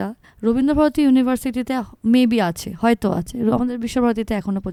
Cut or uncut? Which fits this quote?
uncut